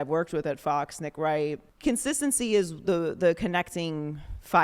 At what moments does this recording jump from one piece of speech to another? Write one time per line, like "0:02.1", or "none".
0:01.7